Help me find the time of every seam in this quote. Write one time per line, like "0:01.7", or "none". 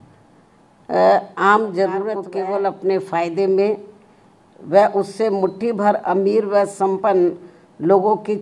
0:02.2